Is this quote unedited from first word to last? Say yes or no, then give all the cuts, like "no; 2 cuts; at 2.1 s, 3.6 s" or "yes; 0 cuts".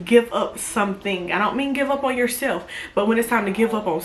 yes; 0 cuts